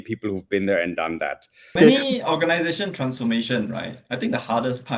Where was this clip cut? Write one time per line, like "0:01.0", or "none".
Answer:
0:01.8